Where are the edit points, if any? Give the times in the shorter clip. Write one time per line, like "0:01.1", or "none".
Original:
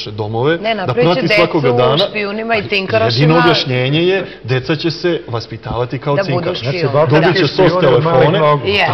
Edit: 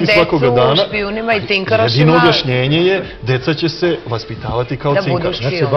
none